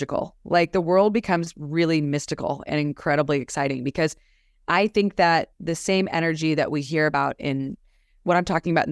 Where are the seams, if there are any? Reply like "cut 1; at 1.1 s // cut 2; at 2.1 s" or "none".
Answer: none